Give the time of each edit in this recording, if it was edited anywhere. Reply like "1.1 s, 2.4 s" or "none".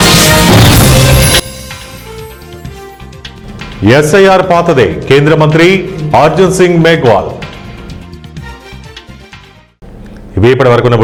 none